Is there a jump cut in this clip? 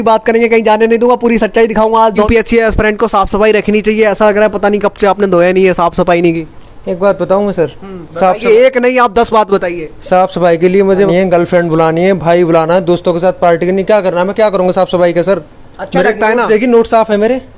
yes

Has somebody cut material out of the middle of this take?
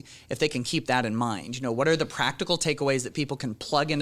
no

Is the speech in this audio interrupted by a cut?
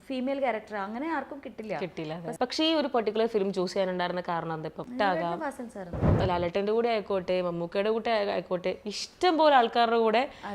yes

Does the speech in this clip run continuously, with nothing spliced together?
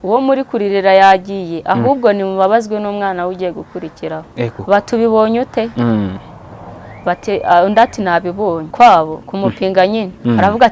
no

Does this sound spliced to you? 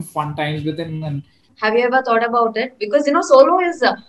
yes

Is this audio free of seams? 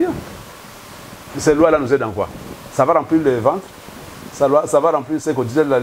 yes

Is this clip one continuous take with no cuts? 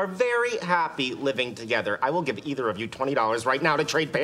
yes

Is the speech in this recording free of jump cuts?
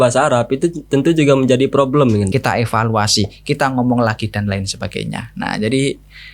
no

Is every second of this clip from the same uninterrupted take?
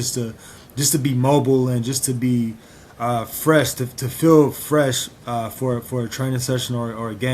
yes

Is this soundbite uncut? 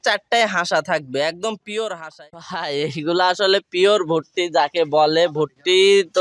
no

